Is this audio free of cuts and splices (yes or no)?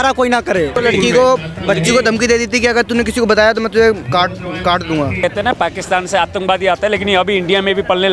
no